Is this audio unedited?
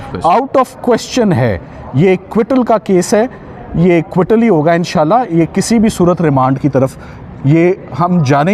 yes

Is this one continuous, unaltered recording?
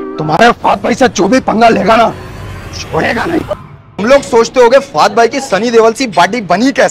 yes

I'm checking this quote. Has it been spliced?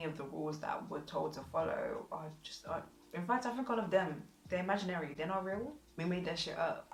no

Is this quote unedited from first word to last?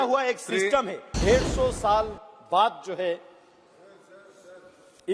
no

